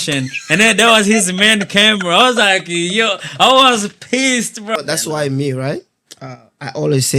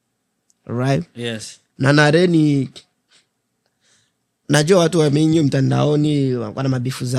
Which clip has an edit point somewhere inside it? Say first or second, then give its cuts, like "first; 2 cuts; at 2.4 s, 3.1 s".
first; 1 cut; at 4.8 s